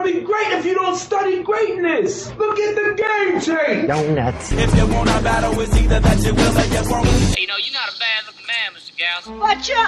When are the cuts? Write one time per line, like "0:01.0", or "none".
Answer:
none